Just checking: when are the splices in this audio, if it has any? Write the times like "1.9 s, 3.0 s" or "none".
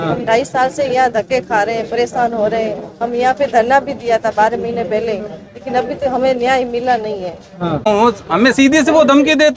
7.9 s